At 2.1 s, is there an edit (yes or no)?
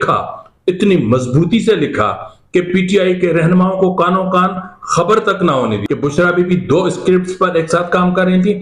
no